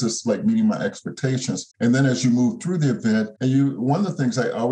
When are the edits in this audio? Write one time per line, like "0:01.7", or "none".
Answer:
0:01.7
0:03.3